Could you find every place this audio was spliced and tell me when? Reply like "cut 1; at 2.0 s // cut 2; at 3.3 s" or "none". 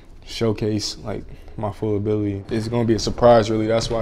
cut 1; at 2.5 s